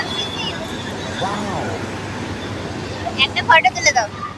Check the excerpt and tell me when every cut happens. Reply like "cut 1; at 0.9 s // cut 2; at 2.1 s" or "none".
none